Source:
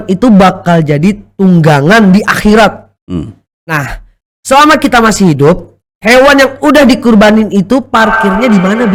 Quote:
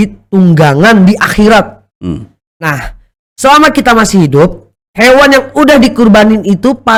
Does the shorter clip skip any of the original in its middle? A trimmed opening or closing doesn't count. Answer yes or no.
no